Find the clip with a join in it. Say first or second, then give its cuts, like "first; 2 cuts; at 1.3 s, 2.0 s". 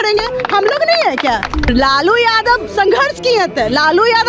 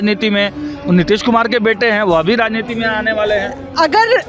first; 1 cut; at 1.7 s